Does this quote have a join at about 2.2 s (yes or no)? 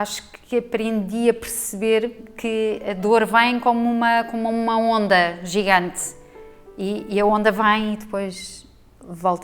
yes